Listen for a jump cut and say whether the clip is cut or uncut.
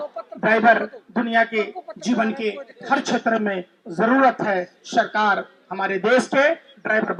uncut